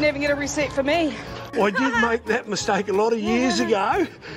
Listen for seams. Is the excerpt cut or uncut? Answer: cut